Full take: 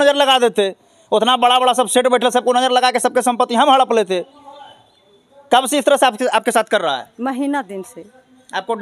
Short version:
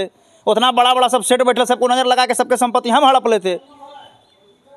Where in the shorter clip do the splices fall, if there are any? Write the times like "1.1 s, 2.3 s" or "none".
none